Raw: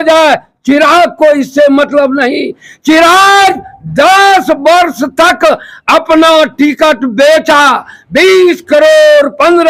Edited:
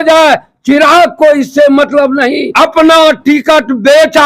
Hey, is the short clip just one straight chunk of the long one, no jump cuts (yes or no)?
no